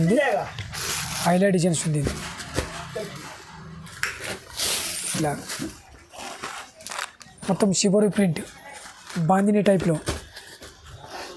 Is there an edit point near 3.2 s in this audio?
no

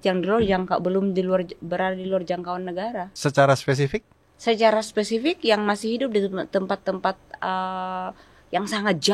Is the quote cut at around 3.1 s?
yes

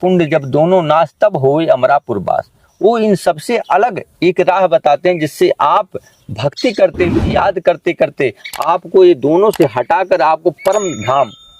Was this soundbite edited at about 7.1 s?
no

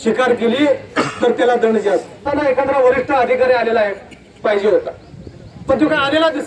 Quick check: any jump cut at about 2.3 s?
yes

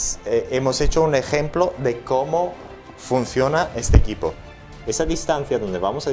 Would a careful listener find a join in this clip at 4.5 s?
yes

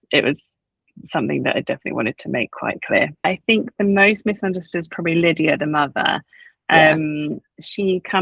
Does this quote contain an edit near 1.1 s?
no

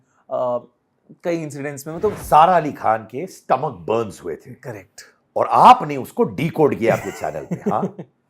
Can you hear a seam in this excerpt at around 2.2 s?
yes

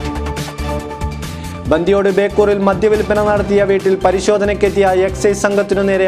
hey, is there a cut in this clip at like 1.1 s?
yes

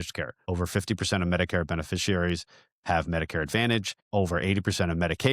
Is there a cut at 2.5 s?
no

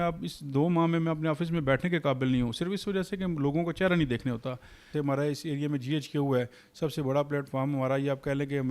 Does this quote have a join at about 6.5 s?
no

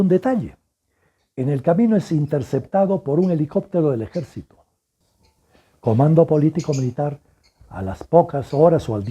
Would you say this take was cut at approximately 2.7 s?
no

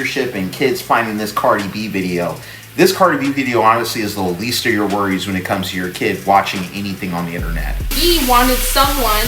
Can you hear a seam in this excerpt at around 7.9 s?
yes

